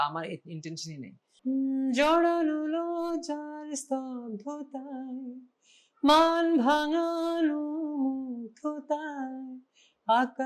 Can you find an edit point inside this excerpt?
yes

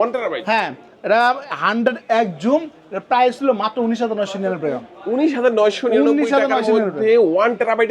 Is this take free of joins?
yes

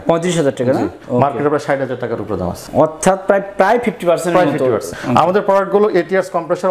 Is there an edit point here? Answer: yes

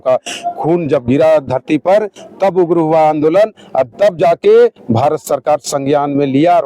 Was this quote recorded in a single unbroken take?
yes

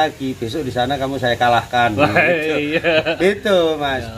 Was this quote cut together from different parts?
no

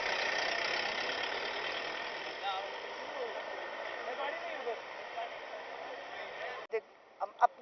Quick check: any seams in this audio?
yes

